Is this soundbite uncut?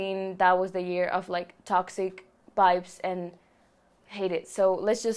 yes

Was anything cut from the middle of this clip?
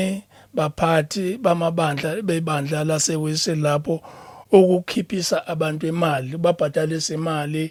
no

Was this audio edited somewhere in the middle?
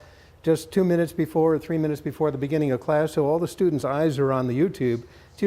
yes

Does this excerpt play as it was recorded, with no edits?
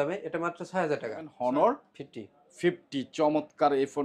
no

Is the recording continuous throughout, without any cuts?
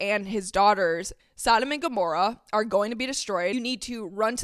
no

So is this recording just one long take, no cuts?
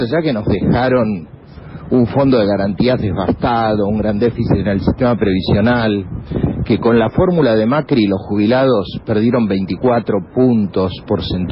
yes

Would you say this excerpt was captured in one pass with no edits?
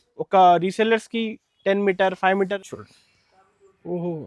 no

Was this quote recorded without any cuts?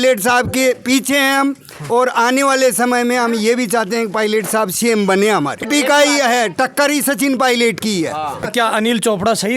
no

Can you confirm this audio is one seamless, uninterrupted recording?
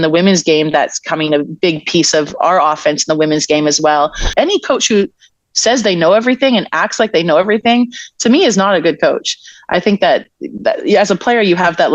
no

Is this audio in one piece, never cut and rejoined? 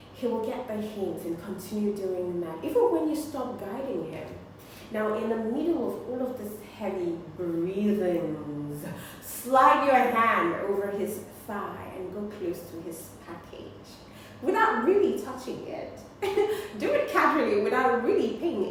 yes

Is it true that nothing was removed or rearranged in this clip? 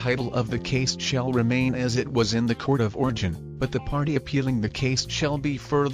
no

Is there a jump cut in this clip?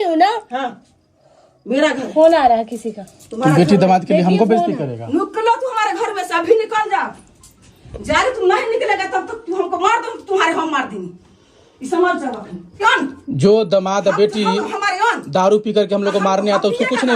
yes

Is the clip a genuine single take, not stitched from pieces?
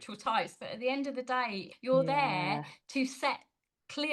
no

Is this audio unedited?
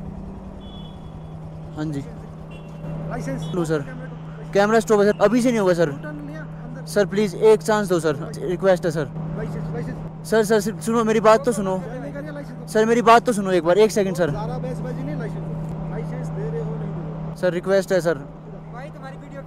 yes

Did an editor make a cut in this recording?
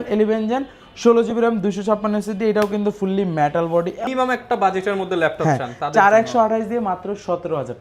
yes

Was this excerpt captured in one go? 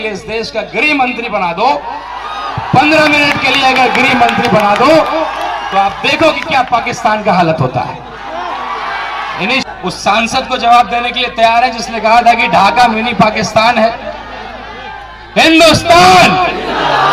no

